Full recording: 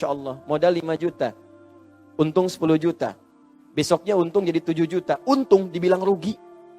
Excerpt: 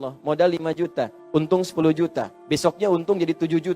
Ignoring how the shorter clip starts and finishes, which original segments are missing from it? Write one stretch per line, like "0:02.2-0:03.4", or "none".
0:01.4-0:02.0
0:03.1-0:03.6